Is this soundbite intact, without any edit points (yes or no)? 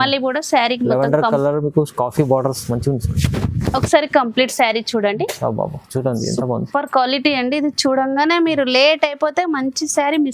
yes